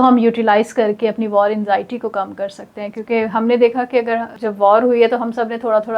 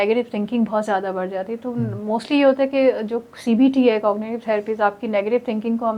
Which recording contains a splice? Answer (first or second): first